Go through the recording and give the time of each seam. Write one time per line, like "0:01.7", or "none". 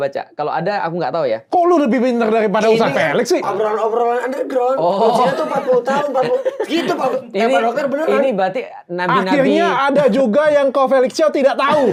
none

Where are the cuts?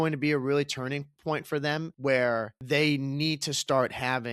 0:01.9
0:02.5

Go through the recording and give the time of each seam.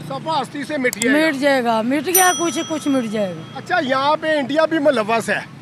none

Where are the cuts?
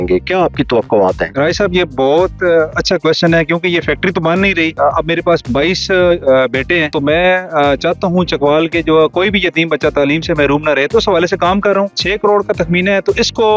0:01.3
0:04.7
0:06.9
0:12.0

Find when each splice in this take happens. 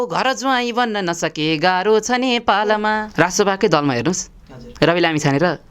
0:03.1

